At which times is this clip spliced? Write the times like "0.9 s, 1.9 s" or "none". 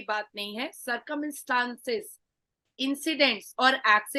none